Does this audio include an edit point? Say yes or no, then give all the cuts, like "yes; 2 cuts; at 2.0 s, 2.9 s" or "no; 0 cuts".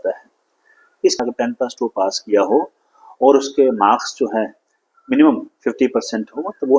yes; 1 cut; at 1.2 s